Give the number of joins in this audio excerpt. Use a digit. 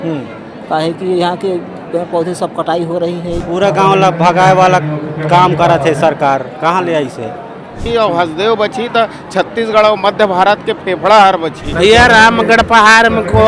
3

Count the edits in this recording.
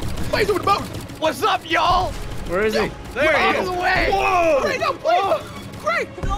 0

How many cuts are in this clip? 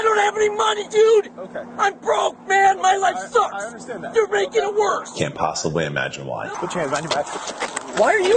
2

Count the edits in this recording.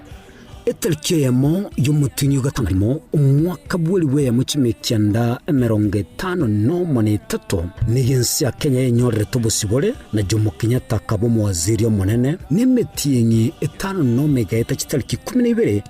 1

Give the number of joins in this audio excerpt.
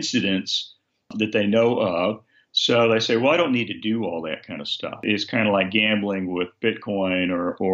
1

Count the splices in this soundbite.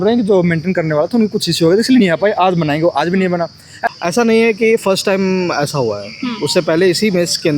1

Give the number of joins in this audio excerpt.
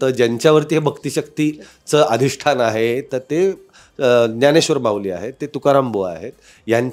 0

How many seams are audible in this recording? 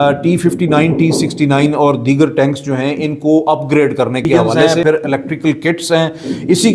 1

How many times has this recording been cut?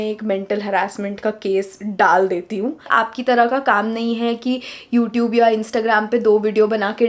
1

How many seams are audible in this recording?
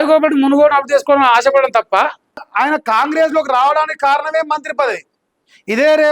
1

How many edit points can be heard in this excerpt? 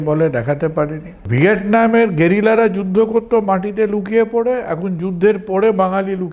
1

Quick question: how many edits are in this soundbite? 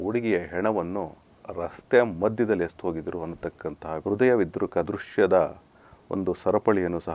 0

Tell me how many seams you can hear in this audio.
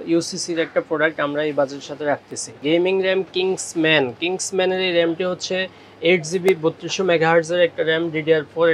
1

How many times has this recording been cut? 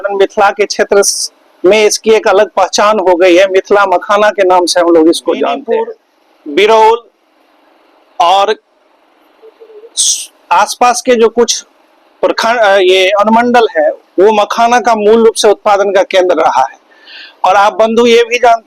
0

